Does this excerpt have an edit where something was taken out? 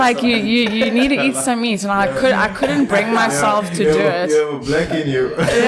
no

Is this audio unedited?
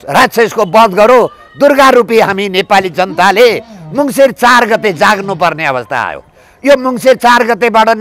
yes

